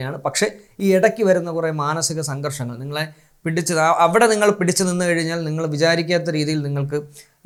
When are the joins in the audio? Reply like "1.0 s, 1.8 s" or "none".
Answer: none